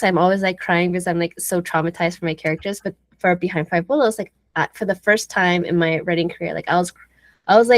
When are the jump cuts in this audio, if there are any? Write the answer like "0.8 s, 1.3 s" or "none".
none

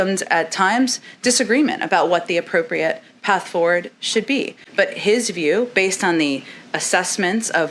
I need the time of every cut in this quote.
none

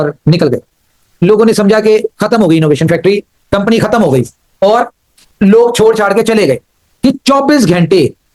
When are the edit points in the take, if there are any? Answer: 0.9 s, 6.8 s

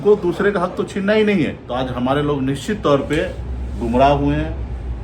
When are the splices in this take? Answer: 1.6 s

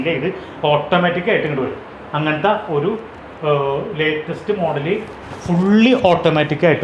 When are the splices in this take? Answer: none

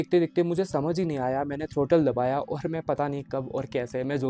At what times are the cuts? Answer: none

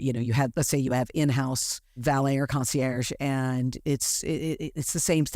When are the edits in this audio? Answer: 2.0 s

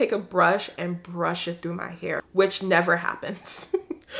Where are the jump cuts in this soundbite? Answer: 2.3 s

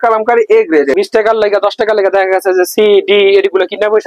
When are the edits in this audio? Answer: 0.9 s

